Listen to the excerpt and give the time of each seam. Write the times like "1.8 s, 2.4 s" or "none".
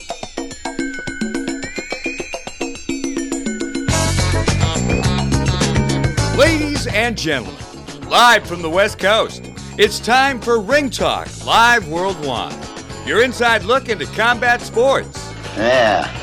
none